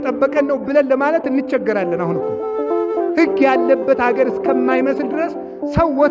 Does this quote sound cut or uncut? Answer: uncut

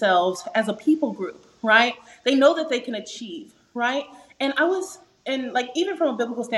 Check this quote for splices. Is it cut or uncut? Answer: uncut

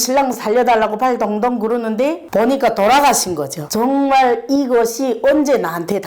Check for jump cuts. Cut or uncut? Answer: cut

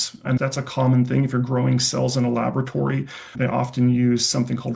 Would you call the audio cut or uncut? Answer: uncut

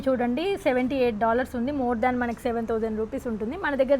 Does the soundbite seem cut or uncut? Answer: uncut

